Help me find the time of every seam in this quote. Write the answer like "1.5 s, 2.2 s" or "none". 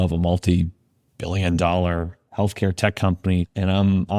2.2 s